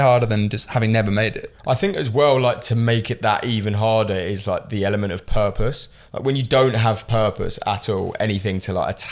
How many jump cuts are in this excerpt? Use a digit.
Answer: 0